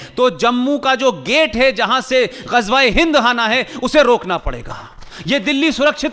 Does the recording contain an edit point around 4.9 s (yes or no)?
no